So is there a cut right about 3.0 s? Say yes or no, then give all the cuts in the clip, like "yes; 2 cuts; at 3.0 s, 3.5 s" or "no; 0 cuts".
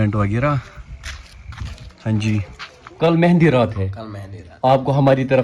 yes; 1 cut; at 3.0 s